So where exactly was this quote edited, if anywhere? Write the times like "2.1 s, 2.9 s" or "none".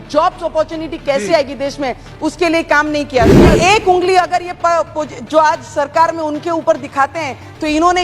3.5 s